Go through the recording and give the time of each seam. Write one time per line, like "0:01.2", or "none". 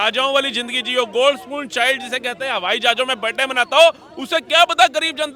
none

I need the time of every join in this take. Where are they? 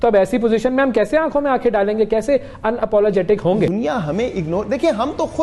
0:03.7

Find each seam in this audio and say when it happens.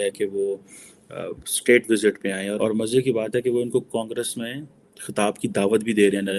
0:02.6

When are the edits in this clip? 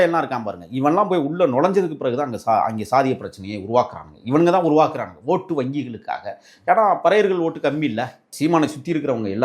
0:08.2

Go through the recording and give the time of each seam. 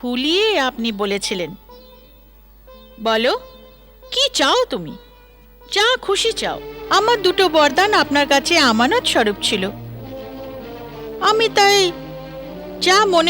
0:06.7

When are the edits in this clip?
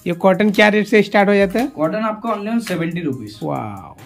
none

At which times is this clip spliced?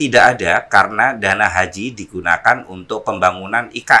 none

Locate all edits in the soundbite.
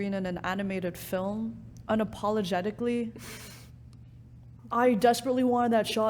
0:04.6

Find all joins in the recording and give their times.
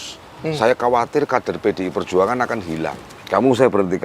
0:03.1

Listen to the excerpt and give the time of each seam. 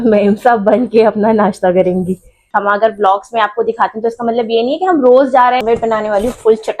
0:02.5
0:05.6

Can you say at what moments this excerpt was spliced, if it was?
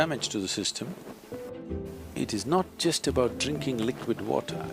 0:01.5

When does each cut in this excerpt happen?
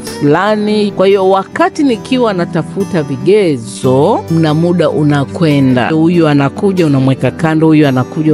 0:00.9
0:04.3
0:05.9

